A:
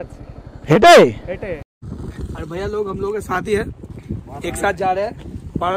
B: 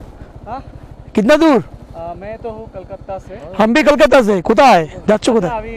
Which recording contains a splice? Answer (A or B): A